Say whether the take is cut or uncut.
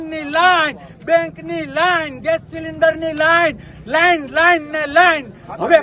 uncut